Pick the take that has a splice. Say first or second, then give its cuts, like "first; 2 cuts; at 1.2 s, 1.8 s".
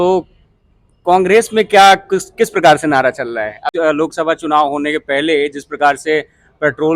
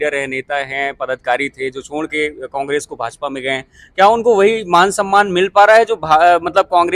first; 1 cut; at 3.7 s